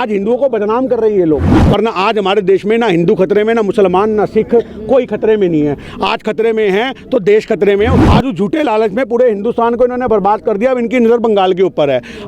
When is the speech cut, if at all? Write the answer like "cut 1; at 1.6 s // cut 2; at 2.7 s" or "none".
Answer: cut 1; at 1.5 s // cut 2; at 8.0 s